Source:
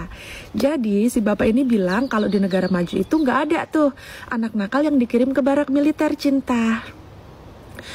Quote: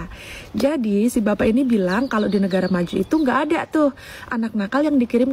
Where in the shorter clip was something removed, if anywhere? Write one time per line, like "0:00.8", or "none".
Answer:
none